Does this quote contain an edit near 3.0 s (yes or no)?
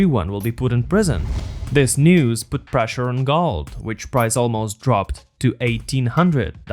no